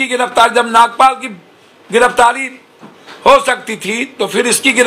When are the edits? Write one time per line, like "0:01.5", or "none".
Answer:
none